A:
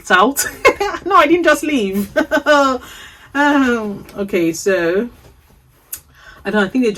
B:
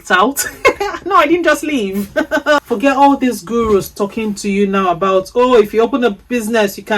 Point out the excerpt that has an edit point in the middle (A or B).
B